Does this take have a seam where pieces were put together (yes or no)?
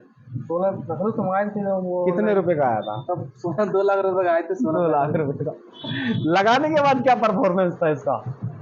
no